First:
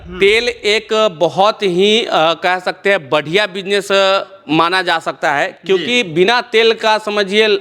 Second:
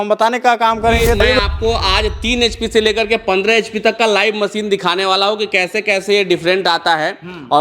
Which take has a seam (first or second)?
second